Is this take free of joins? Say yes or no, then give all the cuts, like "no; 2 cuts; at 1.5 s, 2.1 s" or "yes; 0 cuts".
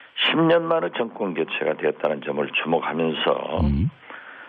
yes; 0 cuts